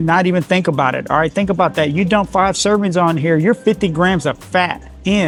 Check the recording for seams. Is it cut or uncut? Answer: uncut